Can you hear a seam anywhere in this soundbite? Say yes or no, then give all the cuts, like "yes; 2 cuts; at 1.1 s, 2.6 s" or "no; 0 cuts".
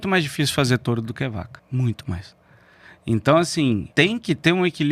yes; 2 cuts; at 1.6 s, 3.9 s